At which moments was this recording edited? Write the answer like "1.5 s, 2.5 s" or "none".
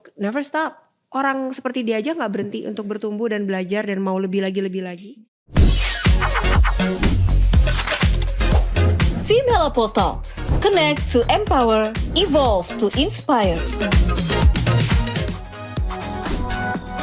5.0 s